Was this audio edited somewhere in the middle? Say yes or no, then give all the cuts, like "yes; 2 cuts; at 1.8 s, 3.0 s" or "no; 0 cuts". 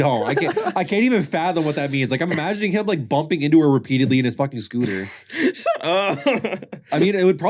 no; 0 cuts